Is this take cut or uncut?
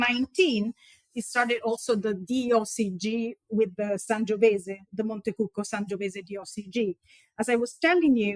uncut